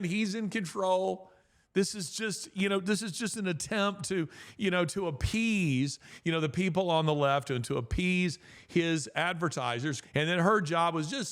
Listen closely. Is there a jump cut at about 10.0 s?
yes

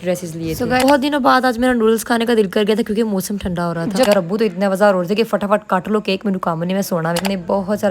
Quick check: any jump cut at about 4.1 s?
yes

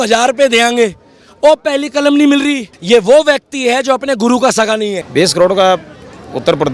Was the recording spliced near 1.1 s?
no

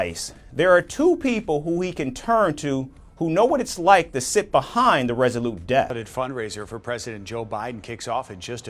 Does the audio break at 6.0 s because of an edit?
yes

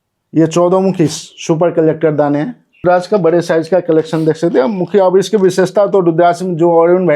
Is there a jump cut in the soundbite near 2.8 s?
yes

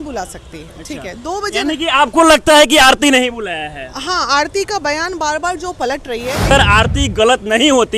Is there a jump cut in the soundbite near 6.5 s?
yes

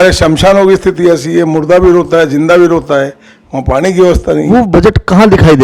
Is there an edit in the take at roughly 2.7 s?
no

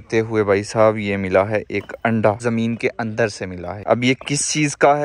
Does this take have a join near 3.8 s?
yes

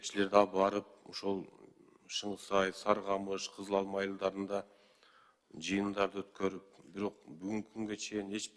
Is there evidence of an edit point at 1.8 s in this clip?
no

